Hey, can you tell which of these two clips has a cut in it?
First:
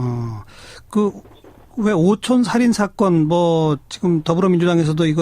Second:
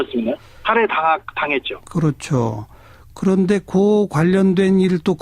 first; 1 cut; at 3.4 s

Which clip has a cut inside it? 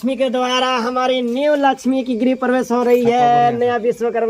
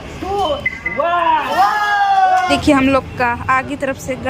second; 1 cut; at 2.5 s

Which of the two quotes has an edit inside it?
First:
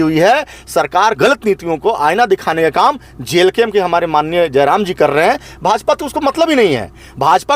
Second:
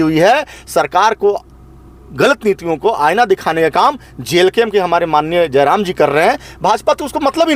first; 1 cut; at 1.2 s

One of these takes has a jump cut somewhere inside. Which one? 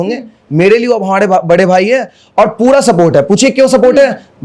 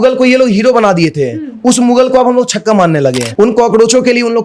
second; 1 cut; at 3.2 s

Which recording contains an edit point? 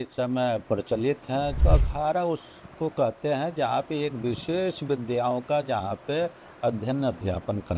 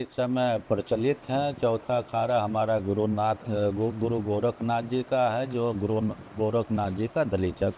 first; 1 cut; at 1.6 s

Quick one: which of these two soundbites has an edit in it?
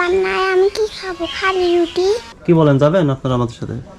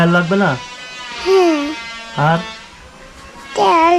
first; 1 cut; at 2.3 s

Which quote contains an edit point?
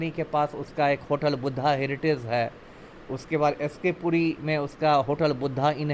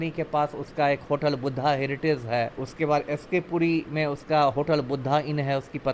second; 1 cut; at 2.6 s

